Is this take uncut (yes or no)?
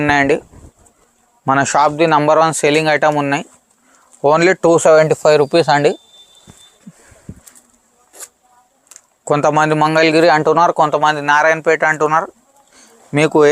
yes